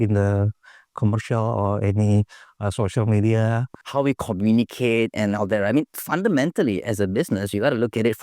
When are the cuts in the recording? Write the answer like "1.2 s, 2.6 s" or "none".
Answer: 3.7 s